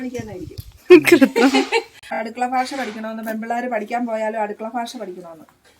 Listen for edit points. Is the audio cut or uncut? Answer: cut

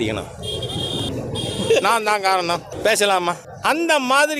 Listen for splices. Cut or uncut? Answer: cut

